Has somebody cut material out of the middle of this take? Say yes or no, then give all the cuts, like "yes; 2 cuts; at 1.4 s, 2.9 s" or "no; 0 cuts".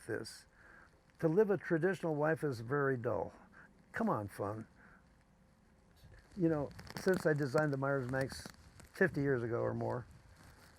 yes; 1 cut; at 5.9 s